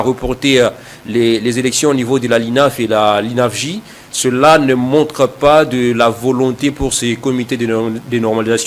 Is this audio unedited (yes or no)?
yes